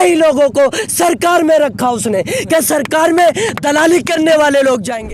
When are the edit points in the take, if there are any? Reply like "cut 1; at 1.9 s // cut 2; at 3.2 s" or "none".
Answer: none

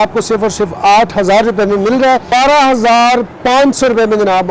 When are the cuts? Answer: cut 1; at 2.3 s

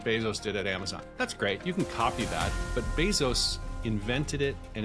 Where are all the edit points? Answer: cut 1; at 1.0 s // cut 2; at 2.6 s

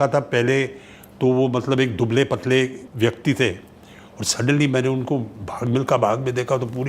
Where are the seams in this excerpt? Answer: cut 1; at 2.8 s

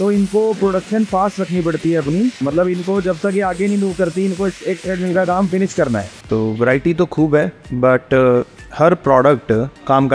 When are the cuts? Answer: cut 1; at 2.4 s // cut 2; at 6.1 s

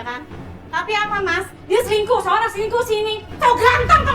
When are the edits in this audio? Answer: cut 1; at 1.6 s

